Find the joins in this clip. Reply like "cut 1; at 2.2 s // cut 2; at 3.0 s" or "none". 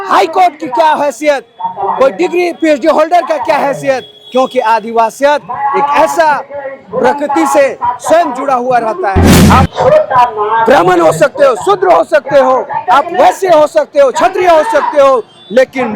cut 1; at 9.3 s

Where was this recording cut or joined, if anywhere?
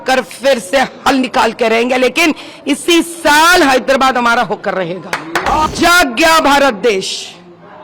cut 1; at 5.7 s

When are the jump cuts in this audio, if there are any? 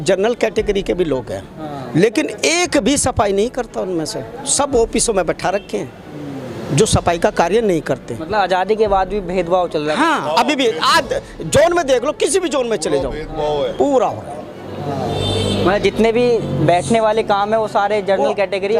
none

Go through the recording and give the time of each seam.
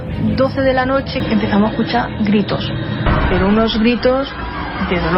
cut 1; at 1.2 s

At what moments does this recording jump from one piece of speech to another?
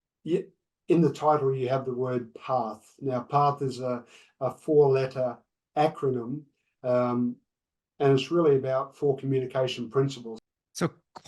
cut 1; at 10.3 s

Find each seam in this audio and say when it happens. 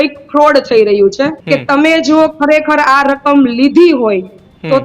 cut 1; at 1.4 s

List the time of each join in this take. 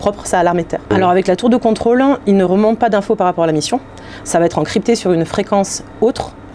cut 1; at 0.9 s

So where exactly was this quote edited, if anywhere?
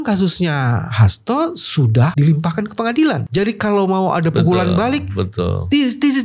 cut 1; at 2.1 s // cut 2; at 3.2 s

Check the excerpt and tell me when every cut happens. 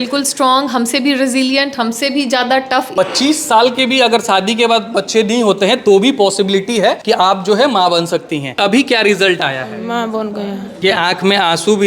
cut 1; at 2.9 s // cut 2; at 7.0 s // cut 3; at 8.5 s // cut 4; at 10.8 s

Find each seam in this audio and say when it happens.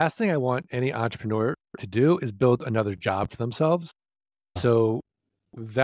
cut 1; at 4.6 s

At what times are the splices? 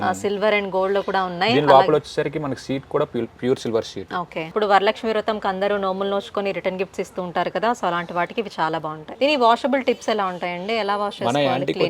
cut 1; at 4.4 s // cut 2; at 9.0 s

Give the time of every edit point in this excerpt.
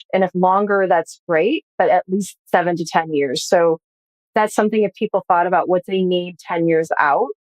cut 1; at 2.3 s

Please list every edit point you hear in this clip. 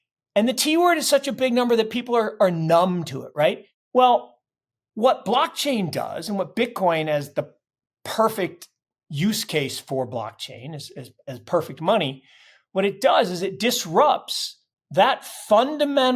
cut 1; at 3.7 s

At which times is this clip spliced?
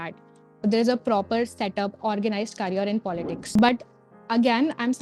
cut 1; at 3.4 s

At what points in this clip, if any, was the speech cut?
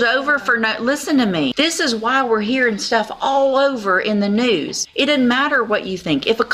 cut 1; at 1.5 s // cut 2; at 4.8 s

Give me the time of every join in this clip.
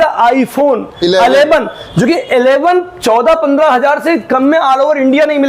none

